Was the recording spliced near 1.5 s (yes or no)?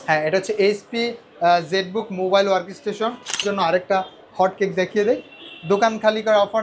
no